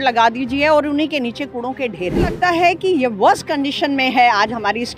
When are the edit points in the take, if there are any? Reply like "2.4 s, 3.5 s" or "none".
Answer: 2.4 s